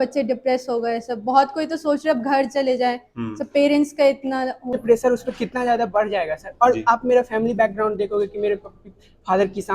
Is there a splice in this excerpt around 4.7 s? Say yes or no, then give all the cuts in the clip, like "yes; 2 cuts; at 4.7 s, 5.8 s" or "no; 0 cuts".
yes; 1 cut; at 4.7 s